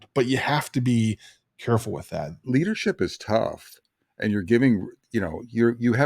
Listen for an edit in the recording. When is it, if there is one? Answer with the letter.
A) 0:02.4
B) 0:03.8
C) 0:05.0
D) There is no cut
A